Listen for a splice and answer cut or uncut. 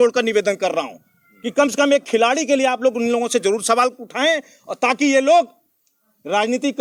uncut